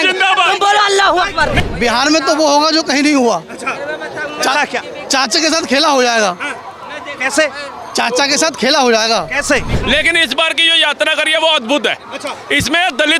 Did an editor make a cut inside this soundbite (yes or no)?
yes